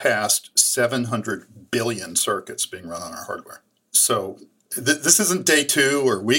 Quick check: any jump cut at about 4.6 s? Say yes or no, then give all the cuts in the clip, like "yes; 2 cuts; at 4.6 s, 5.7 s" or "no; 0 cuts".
yes; 1 cut; at 4.6 s